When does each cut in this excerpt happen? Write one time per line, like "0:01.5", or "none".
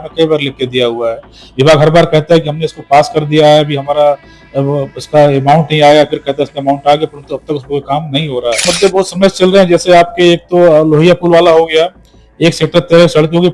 0:08.7